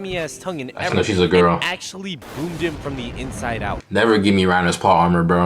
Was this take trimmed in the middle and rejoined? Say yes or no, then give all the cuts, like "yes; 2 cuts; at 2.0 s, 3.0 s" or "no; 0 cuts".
yes; 1 cut; at 3.8 s